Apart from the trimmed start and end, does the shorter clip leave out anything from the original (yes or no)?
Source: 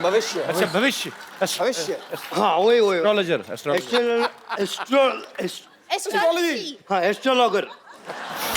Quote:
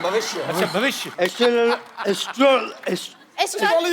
yes